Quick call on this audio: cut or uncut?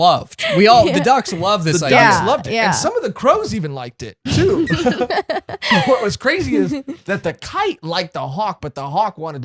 uncut